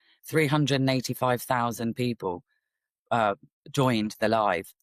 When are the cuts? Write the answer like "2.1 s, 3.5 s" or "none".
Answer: none